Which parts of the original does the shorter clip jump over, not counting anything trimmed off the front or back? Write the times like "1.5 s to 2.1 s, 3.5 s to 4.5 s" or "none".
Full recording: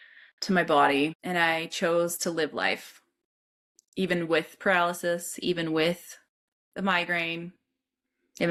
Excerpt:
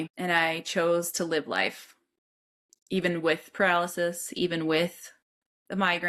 none